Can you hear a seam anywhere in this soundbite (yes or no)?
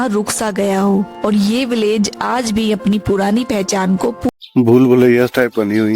yes